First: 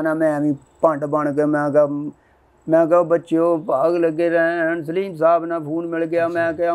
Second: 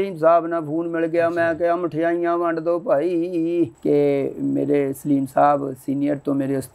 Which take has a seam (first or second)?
second